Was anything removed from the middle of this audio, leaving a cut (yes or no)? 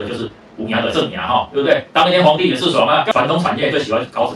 yes